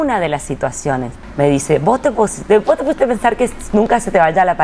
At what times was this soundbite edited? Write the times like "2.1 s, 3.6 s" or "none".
1.2 s